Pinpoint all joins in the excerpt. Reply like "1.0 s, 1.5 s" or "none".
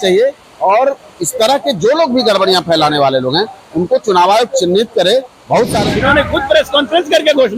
5.8 s

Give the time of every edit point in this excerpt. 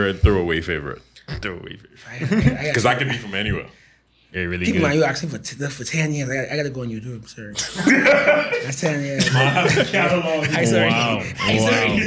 none

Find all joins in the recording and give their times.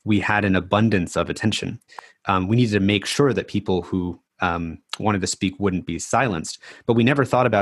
none

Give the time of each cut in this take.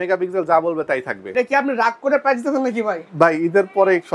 1.3 s

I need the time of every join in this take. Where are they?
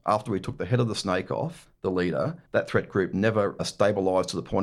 1.6 s, 2.4 s, 3.6 s

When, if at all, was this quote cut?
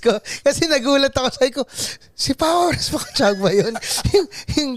none

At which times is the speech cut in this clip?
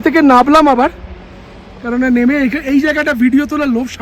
none

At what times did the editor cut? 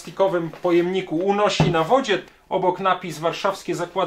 2.2 s

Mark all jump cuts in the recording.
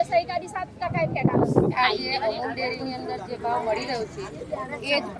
1.7 s

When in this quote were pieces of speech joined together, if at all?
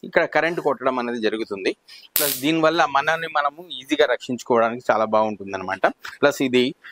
none

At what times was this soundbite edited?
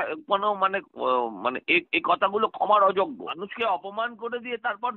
3.3 s

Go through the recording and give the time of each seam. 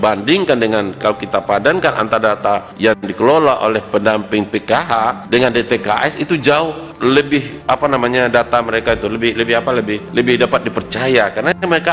2.7 s, 5.2 s, 6.8 s, 7.5 s, 10.0 s

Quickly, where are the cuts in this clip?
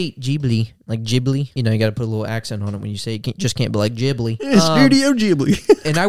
1.5 s, 4.5 s

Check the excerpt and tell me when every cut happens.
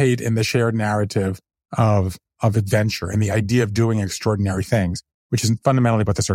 none

